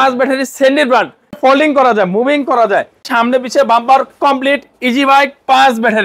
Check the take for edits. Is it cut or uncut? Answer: cut